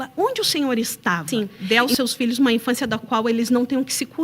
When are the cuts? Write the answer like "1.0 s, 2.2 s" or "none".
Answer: 1.6 s